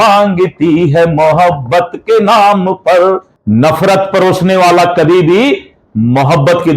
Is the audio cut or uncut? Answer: cut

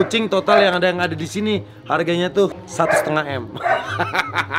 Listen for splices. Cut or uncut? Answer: uncut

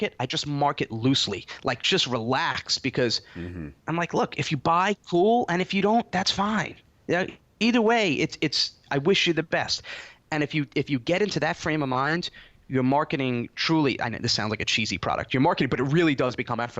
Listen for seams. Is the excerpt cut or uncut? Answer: cut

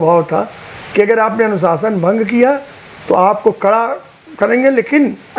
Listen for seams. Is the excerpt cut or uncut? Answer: uncut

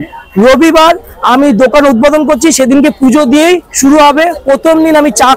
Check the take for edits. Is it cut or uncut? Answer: uncut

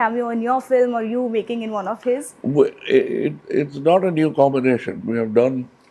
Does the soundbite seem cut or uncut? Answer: uncut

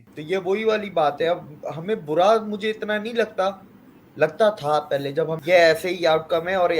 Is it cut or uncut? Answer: cut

